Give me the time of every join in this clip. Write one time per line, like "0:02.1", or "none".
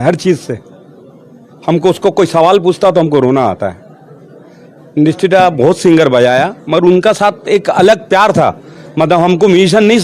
none